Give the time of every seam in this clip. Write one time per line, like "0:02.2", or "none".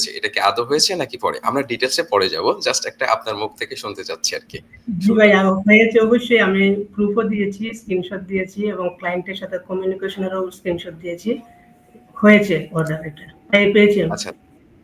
none